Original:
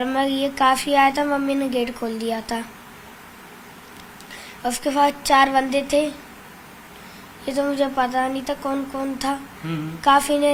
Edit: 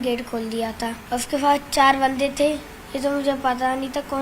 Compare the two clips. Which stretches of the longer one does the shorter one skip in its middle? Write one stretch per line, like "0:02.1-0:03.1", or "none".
0:02.7-0:04.5
0:06.3-0:07.3